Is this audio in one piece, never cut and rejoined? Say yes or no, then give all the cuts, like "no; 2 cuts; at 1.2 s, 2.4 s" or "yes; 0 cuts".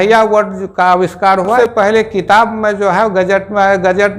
no; 1 cut; at 1.6 s